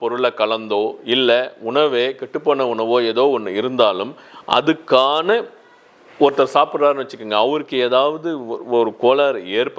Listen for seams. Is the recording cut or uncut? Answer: uncut